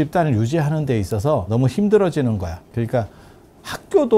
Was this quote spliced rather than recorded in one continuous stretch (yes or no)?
yes